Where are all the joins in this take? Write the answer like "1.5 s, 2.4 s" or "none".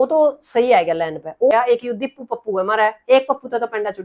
1.5 s